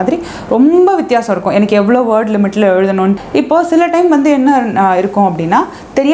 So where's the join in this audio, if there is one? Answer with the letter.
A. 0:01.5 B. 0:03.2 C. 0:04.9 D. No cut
B